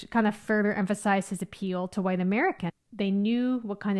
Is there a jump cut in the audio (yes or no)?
yes